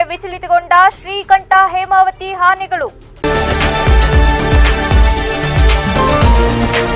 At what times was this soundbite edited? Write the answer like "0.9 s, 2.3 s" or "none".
3.0 s